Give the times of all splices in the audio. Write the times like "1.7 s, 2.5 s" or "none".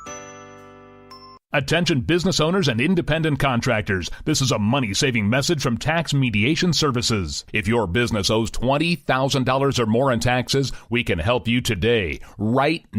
1.0 s